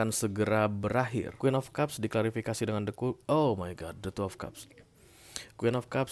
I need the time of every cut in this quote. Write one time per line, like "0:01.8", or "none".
0:01.3